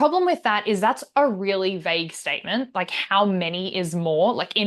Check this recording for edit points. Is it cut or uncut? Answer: uncut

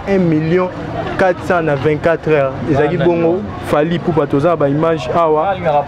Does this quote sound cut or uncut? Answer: uncut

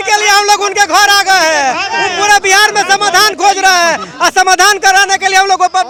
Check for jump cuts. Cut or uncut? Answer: uncut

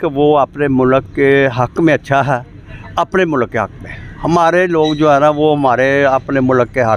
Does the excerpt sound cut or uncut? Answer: uncut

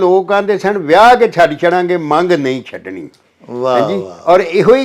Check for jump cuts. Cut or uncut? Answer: uncut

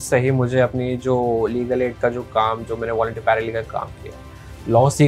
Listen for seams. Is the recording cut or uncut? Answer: uncut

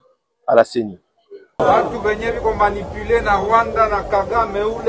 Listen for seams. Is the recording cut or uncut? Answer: cut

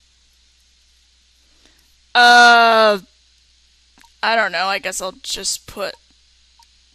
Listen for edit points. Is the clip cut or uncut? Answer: cut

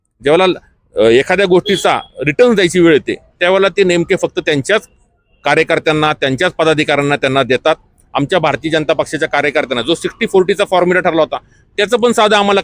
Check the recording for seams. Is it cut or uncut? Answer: uncut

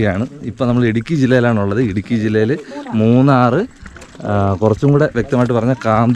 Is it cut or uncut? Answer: uncut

